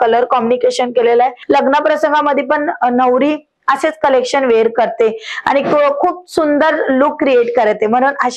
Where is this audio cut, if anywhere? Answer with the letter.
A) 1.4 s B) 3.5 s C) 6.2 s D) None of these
A